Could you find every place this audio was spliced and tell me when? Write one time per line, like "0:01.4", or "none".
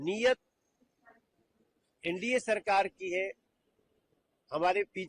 none